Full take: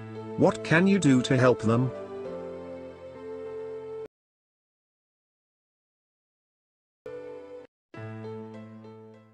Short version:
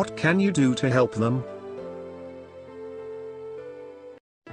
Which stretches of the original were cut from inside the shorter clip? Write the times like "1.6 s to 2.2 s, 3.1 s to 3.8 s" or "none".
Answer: 4.1 s to 7.1 s